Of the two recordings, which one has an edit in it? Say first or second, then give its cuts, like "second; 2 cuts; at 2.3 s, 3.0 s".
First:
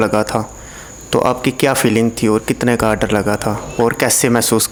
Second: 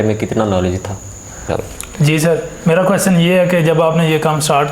second; 1 cut; at 1.5 s